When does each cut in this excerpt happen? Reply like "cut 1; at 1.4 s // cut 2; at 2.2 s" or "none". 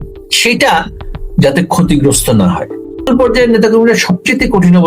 cut 1; at 3.1 s